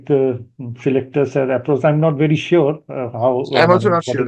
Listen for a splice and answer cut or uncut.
uncut